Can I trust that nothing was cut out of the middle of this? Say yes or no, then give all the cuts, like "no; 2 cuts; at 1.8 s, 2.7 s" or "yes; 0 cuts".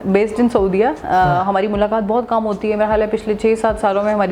yes; 0 cuts